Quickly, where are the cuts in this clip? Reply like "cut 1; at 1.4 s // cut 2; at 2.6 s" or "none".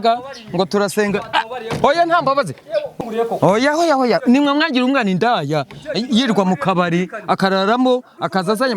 cut 1; at 2.9 s